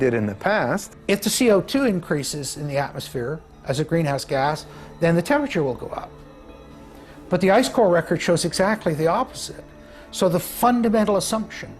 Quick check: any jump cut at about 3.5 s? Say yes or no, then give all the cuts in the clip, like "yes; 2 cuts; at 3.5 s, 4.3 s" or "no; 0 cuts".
no; 1 cut; at 0.9 s